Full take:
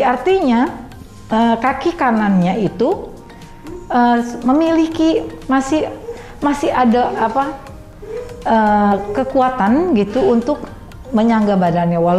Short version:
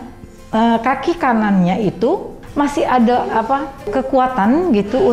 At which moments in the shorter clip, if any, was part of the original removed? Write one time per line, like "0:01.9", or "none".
0:02.4
0:03.8